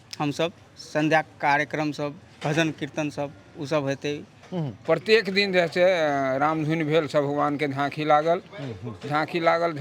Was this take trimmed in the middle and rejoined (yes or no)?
yes